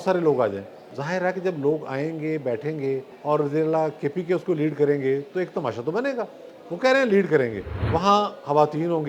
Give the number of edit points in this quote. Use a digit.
3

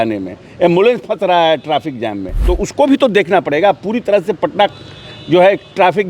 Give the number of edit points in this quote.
1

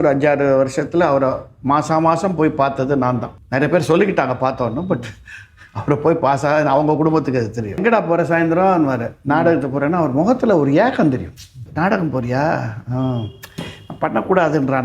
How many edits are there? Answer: 3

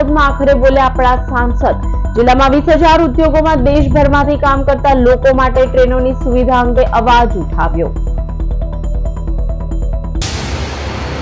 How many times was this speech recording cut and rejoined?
1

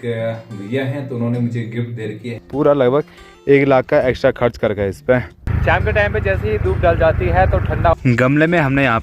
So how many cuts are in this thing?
3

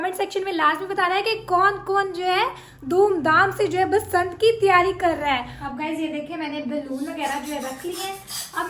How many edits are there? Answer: 1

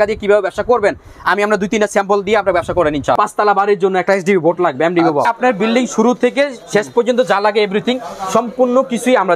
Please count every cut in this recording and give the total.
2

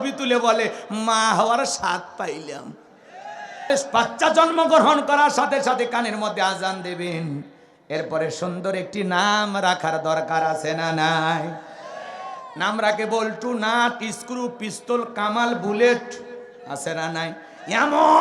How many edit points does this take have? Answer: 1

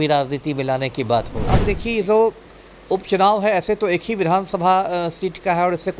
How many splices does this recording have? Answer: 1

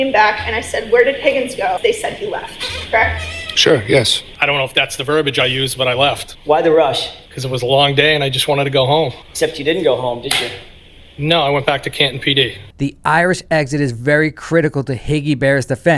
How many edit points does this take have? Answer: 4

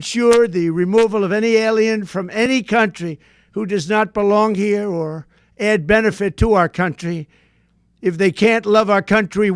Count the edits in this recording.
0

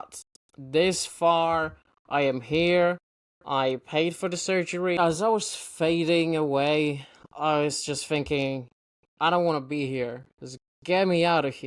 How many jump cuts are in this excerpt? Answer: 1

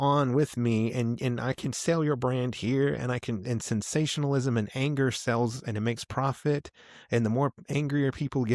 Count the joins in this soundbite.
0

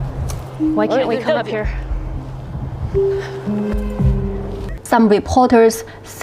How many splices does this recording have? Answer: 1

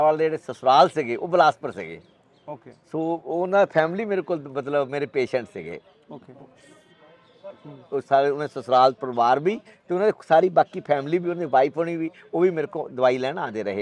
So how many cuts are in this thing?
0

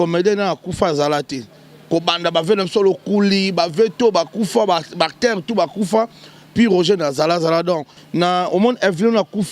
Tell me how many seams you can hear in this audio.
1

